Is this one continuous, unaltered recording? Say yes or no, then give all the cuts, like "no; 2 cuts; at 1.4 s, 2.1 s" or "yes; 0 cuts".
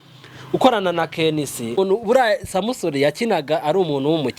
no; 1 cut; at 1.8 s